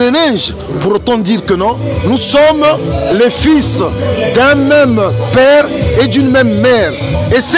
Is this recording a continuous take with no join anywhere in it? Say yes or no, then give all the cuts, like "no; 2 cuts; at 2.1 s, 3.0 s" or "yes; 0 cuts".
yes; 0 cuts